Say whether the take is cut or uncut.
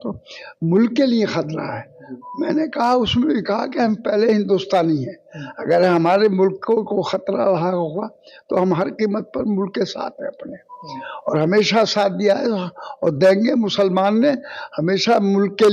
uncut